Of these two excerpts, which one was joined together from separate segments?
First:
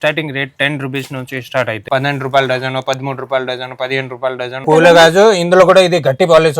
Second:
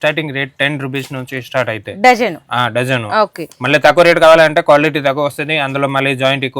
first; 2 cuts; at 1.8 s, 4.6 s

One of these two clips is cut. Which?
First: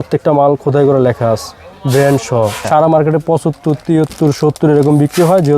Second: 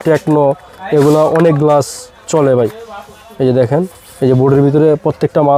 first; 1 cut; at 2.6 s

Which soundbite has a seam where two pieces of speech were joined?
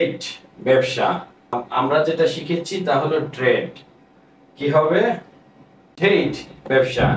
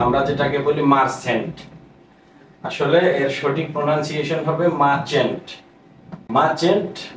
first; 1 cut; at 1.6 s

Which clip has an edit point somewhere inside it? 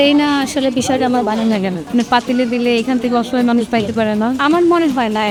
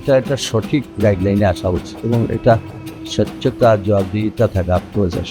second; 1 cut; at 0.9 s

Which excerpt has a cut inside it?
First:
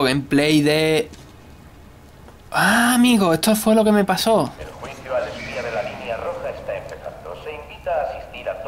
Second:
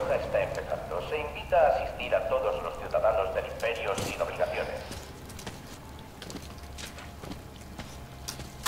first; 1 cut; at 4.7 s

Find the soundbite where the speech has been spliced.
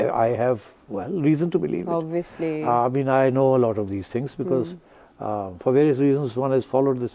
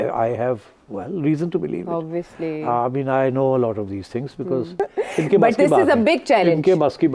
second; 1 cut; at 4.7 s

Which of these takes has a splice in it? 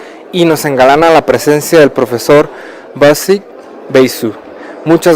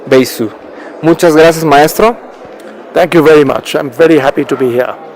second; 1 cut; at 3.6 s

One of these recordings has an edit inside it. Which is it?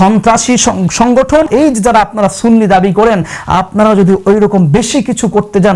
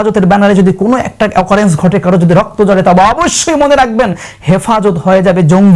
first; 1 cut; at 1.5 s

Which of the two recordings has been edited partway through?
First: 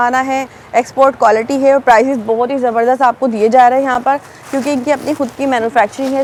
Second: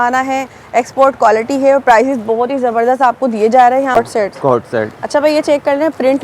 second; 1 cut; at 4.0 s

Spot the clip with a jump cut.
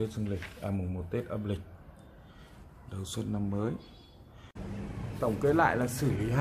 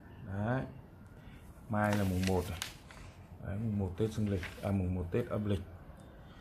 first; 1 cut; at 4.5 s

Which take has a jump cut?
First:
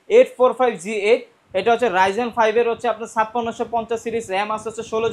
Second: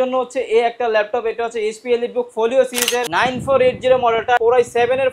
second; 2 cuts; at 3.1 s, 4.4 s

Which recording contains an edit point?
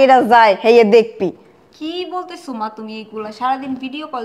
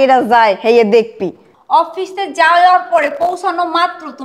second; 1 cut; at 1.5 s

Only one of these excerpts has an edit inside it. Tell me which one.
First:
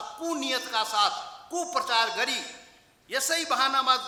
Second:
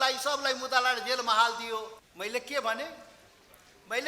second; 1 cut; at 2.0 s

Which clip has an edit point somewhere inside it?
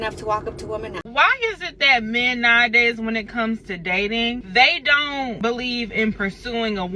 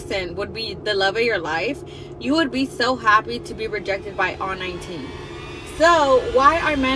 first; 1 cut; at 1.1 s

